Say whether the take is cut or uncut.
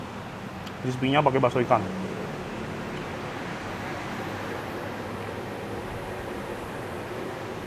uncut